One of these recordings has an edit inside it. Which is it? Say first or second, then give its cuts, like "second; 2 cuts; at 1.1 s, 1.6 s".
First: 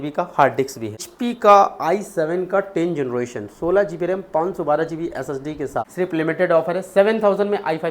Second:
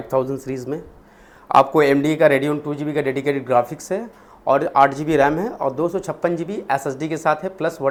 first; 2 cuts; at 1.1 s, 5.9 s